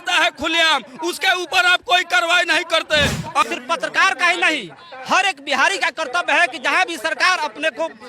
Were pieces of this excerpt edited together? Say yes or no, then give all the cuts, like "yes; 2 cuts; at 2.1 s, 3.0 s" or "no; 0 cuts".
yes; 1 cut; at 3.4 s